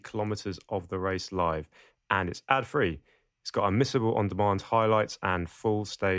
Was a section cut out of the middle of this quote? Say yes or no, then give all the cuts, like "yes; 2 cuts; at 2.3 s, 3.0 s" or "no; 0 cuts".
no; 0 cuts